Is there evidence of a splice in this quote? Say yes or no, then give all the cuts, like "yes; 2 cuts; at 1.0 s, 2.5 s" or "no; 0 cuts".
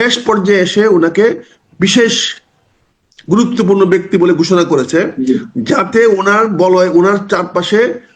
no; 0 cuts